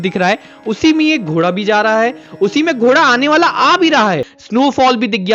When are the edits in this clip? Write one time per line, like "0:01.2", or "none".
0:04.3